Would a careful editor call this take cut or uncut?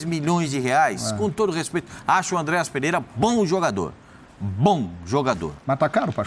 uncut